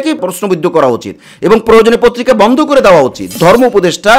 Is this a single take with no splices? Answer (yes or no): no